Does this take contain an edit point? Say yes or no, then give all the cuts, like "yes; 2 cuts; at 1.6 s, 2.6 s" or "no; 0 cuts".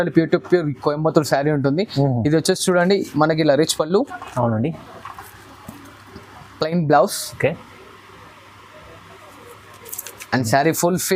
no; 0 cuts